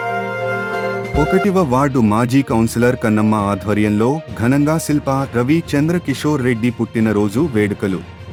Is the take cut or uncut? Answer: uncut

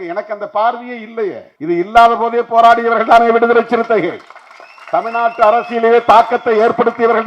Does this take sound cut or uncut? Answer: cut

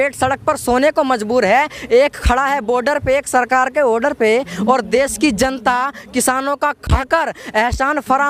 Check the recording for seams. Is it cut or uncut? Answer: uncut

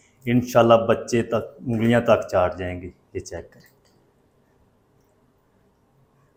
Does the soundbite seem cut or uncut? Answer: uncut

